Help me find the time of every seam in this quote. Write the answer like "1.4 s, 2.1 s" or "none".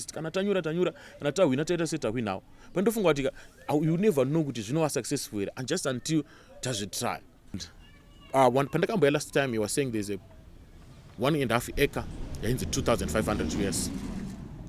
7.6 s